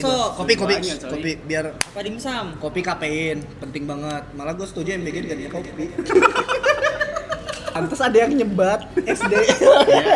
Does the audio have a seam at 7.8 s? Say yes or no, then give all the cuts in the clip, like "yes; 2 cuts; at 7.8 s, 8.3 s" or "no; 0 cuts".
yes; 1 cut; at 7.8 s